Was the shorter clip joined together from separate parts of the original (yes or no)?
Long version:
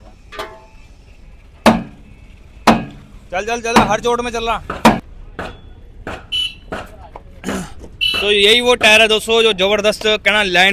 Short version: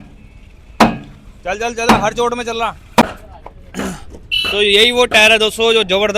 yes